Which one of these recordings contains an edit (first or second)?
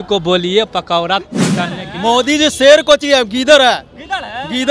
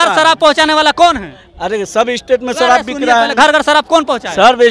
first